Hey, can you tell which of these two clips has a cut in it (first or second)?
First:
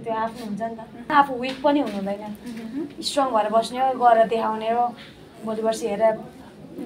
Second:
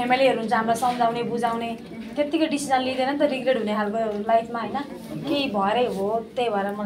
first